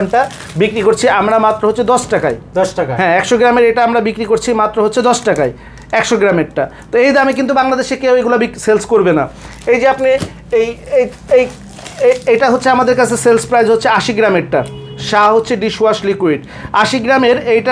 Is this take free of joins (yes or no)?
yes